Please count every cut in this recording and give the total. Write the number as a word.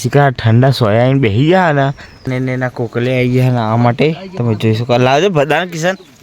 one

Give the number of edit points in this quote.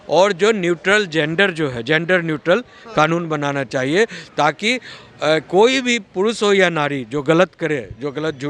zero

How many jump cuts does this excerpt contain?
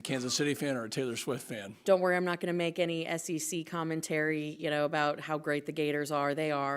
one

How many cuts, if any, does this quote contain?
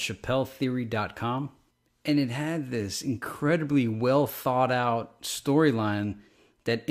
zero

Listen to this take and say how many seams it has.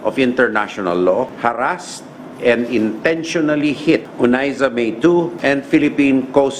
three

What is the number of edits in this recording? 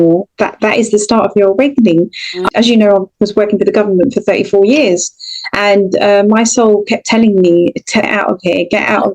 one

